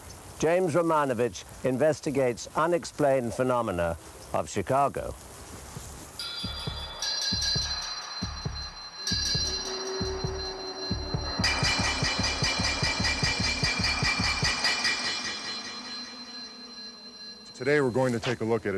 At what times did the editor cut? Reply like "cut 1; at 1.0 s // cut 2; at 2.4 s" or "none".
none

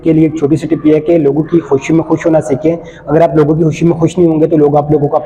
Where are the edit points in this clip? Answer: none

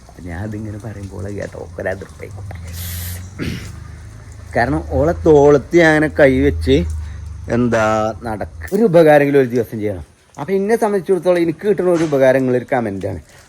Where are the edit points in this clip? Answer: cut 1; at 8.6 s

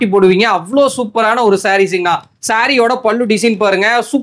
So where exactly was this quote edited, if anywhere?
none

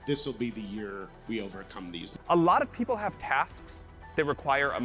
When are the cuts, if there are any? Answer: cut 1; at 2.2 s

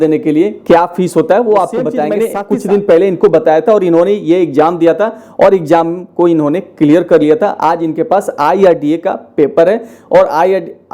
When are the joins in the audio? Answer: cut 1; at 2.1 s

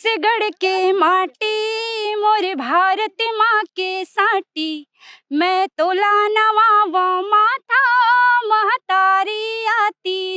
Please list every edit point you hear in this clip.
none

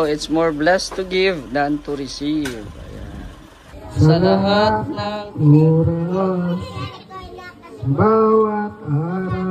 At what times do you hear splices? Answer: cut 1; at 3.8 s

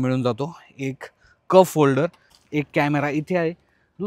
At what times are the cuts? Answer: cut 1; at 2.3 s

